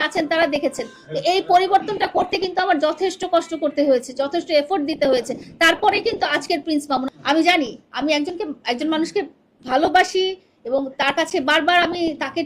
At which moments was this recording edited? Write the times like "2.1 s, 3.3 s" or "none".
7.1 s

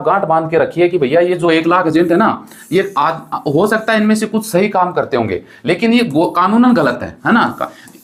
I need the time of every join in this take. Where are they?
none

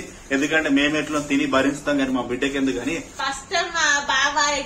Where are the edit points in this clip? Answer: 3.1 s

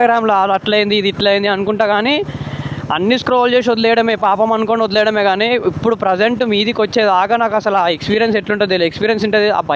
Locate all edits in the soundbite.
none

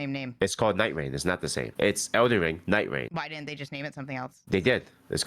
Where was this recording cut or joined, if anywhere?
1.6 s, 3.1 s

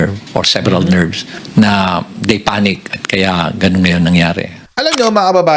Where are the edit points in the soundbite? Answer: 4.6 s

